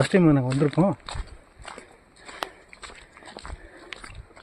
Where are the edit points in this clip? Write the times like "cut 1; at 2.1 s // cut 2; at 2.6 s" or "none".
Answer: none